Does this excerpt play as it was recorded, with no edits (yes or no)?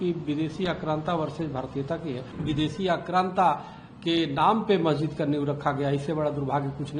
no